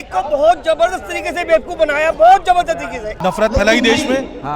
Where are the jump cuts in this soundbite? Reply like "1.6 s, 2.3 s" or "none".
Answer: 3.1 s

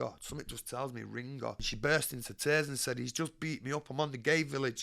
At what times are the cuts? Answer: 1.7 s

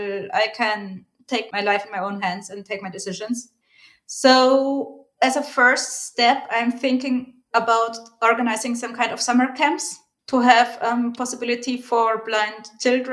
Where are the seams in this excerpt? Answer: 10.1 s

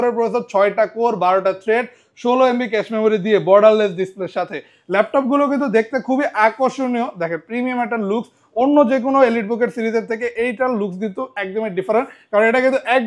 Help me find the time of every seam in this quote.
none

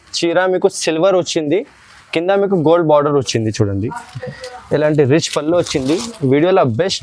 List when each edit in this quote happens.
none

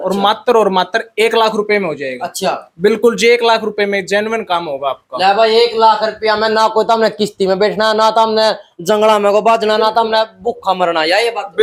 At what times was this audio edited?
none

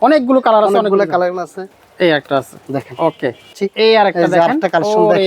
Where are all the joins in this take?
1.6 s, 3.5 s

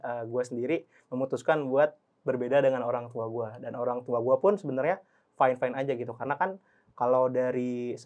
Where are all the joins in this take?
none

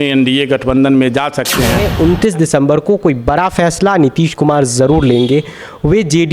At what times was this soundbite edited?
1.8 s

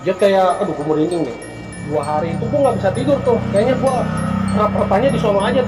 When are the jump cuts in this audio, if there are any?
1.9 s

